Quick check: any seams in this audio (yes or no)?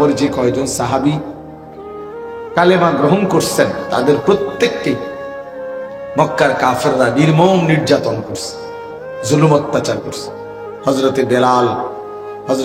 no